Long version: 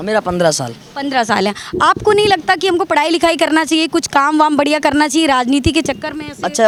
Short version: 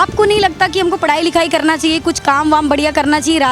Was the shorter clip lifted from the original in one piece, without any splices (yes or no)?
yes